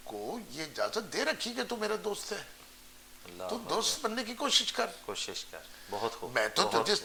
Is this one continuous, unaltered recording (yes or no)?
yes